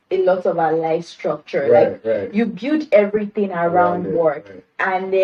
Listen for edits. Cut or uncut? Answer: uncut